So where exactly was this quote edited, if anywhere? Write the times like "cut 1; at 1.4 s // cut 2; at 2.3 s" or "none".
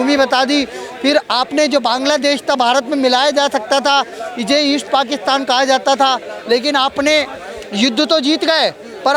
none